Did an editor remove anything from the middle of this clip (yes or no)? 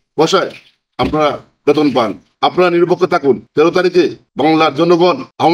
yes